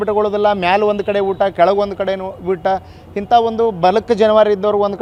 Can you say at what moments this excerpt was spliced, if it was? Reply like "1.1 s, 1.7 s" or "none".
none